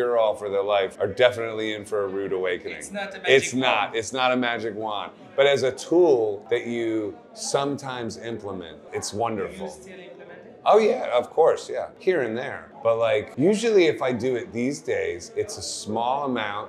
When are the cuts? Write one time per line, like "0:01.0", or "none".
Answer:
none